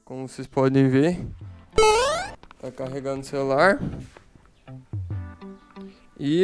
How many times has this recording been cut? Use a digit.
2